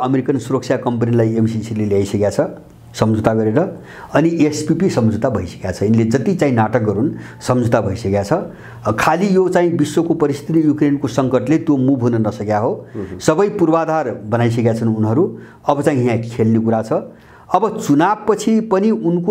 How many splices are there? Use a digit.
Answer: 0